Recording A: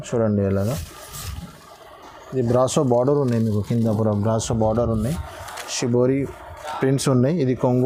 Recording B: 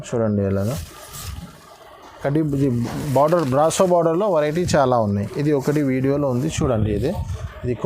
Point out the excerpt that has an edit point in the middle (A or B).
B